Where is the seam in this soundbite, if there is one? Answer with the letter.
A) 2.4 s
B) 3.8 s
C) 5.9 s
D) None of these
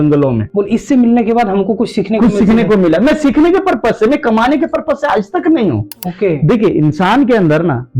C